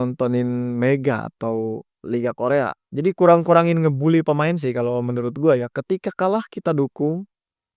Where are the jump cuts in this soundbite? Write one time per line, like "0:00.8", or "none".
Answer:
none